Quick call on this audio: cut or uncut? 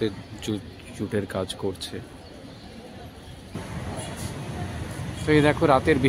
cut